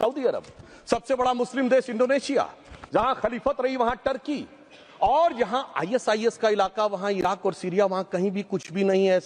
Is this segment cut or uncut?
uncut